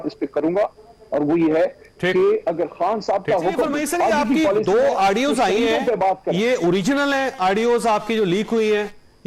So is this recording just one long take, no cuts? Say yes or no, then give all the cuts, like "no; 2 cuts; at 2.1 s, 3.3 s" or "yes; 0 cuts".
no; 1 cut; at 3.8 s